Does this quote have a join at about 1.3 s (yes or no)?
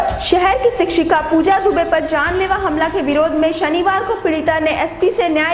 no